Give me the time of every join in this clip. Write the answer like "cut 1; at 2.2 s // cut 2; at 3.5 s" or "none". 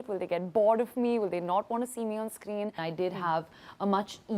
cut 1; at 2.8 s